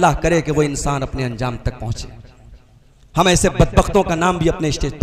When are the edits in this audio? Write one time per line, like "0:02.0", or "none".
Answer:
none